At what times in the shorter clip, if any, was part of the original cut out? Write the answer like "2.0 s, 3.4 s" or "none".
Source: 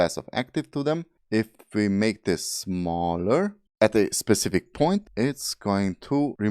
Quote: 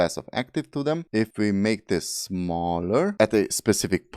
1.2 s, 3.1 s